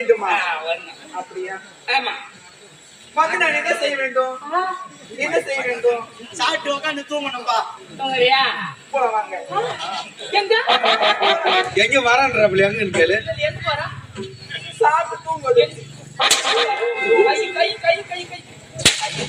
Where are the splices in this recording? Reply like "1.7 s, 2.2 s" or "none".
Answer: 11.7 s